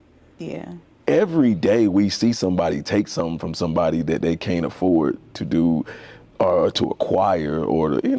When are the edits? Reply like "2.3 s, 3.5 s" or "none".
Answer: none